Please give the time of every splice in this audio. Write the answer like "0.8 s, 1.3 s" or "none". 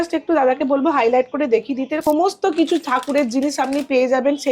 2.0 s